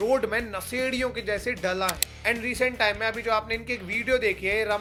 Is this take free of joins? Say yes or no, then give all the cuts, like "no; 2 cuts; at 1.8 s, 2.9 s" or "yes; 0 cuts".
yes; 0 cuts